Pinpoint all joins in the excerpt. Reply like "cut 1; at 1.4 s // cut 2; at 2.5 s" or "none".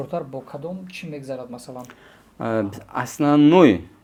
none